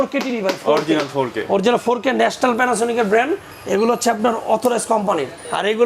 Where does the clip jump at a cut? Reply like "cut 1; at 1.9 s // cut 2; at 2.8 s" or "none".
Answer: none